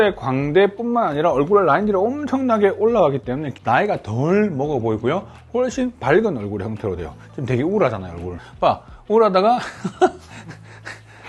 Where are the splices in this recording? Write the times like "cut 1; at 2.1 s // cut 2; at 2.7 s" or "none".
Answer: cut 1; at 3.5 s // cut 2; at 8.4 s

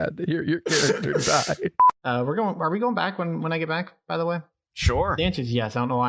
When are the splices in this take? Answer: cut 1; at 1.8 s

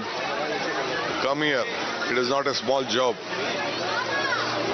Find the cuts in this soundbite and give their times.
none

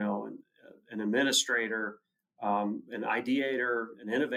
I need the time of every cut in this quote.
none

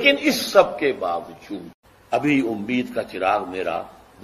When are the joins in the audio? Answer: cut 1; at 2.2 s

